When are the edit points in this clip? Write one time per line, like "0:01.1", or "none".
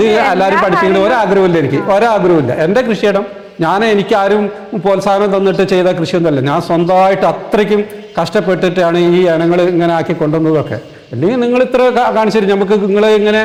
none